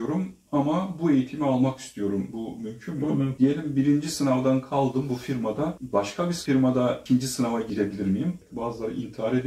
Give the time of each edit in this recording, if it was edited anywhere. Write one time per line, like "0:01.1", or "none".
0:03.3
0:08.4